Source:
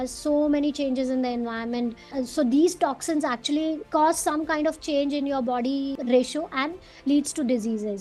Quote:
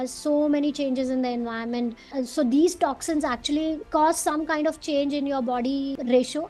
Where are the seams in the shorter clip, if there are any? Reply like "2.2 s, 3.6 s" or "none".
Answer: none